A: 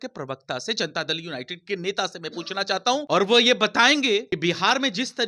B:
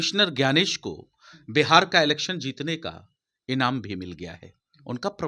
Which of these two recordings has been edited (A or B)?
A